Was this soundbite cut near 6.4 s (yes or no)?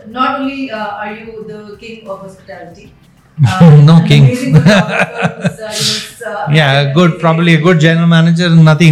no